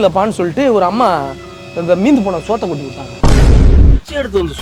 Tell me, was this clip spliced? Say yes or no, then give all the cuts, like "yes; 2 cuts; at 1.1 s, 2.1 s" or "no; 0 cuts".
no; 0 cuts